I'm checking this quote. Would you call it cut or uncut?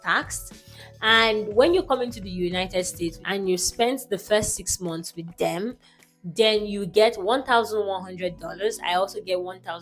cut